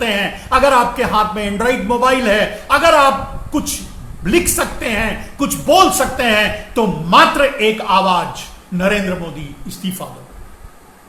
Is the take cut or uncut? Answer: uncut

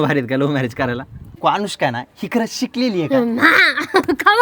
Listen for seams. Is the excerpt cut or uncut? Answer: cut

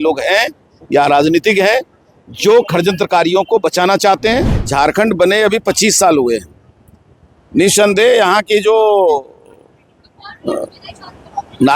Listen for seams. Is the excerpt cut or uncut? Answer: cut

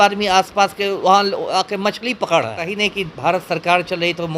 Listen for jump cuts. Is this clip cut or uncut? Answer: cut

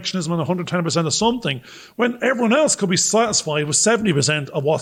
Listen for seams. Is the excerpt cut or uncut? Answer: uncut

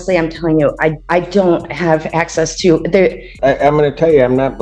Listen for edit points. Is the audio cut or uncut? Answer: cut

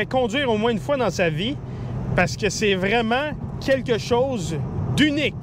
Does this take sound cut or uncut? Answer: uncut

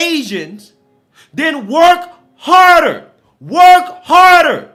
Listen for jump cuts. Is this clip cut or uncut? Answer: uncut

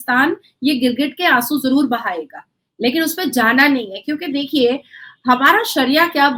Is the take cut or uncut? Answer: uncut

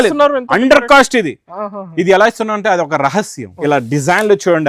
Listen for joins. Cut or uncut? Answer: cut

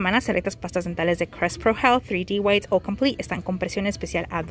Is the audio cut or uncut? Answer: uncut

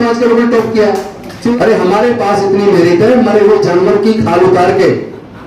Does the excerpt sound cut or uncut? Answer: cut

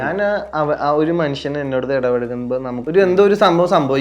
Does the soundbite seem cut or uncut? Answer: cut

